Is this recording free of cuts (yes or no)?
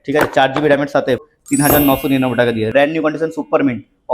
no